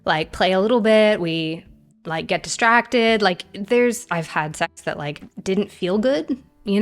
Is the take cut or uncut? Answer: cut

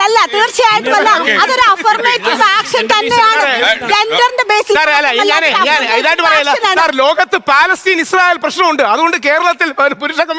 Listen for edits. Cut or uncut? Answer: uncut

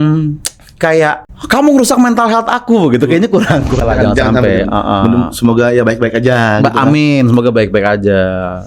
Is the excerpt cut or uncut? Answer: cut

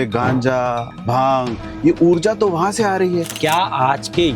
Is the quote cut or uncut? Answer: cut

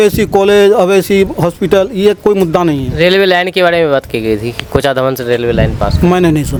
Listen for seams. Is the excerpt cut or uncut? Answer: uncut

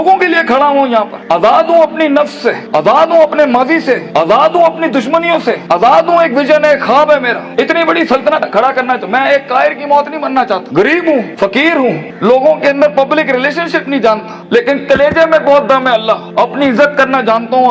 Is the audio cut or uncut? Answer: uncut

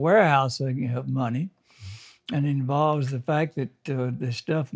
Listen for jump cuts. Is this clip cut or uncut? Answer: uncut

